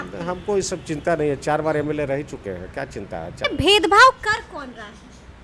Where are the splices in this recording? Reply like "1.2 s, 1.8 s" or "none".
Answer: 3.4 s